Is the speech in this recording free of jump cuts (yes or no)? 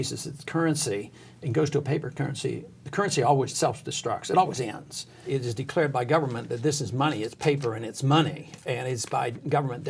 no